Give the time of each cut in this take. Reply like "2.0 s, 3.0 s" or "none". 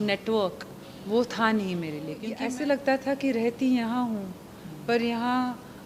2.3 s